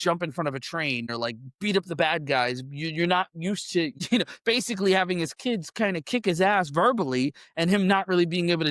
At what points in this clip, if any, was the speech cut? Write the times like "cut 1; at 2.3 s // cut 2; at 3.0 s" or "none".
cut 1; at 1.1 s // cut 2; at 4.0 s